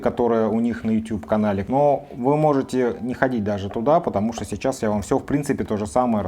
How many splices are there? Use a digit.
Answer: 1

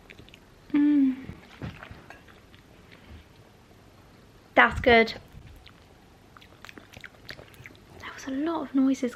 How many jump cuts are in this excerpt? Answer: 0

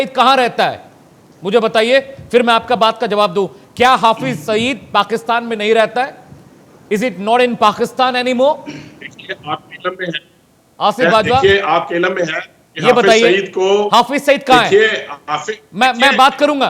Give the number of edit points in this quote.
0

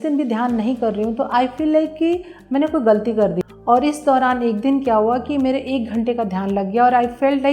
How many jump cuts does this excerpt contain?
1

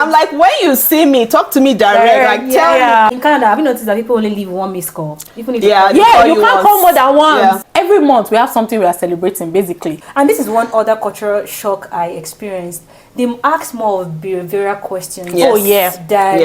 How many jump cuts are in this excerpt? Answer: 3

